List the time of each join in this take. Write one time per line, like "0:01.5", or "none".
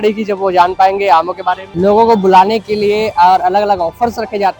0:01.6